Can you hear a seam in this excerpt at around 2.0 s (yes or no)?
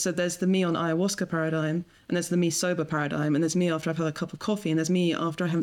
no